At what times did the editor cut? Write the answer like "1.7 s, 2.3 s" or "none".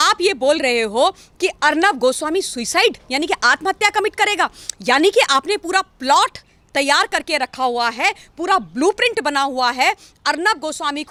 none

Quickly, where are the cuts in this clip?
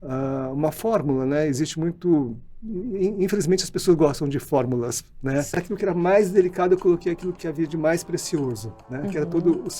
5.6 s

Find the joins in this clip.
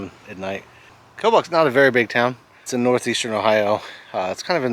1.0 s, 2.7 s

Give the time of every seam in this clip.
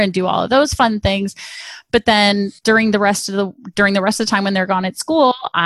2.6 s

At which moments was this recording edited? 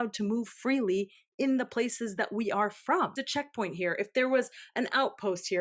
3.1 s

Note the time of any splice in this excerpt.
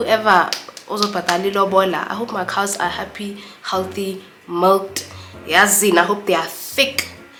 none

